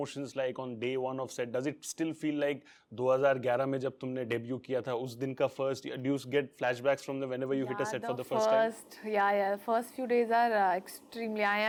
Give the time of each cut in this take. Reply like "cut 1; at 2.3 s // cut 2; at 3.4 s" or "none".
none